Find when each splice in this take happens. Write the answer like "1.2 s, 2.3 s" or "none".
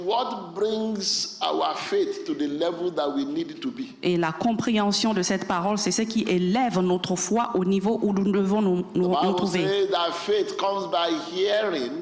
none